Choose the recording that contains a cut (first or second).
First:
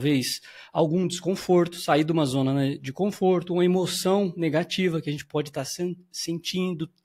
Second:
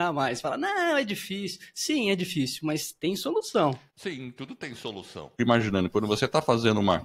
second